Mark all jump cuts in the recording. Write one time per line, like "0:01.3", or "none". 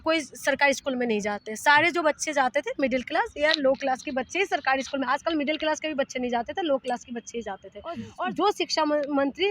0:08.1